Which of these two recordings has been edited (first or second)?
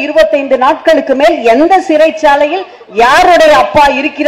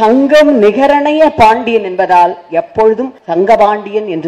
second